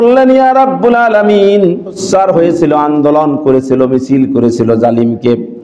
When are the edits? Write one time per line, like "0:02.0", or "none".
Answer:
0:02.0